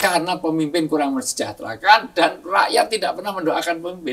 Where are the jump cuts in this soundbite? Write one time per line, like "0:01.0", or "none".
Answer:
none